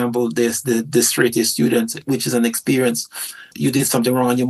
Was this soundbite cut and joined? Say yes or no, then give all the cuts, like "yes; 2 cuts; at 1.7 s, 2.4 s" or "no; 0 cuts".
yes; 2 cuts; at 2.0 s, 3.5 s